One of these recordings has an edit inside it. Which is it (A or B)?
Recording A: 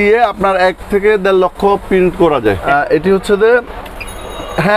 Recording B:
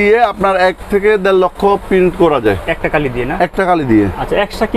A